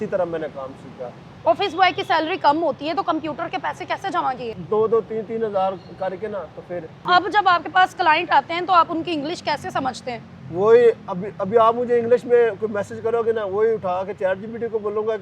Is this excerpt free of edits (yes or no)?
no